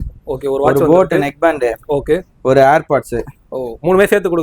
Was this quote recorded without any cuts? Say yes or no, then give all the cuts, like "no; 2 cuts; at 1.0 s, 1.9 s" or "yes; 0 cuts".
yes; 0 cuts